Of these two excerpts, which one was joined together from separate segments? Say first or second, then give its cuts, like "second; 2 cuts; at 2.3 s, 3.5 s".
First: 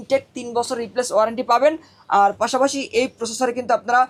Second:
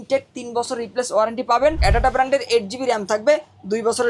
second; 1 cut; at 1.8 s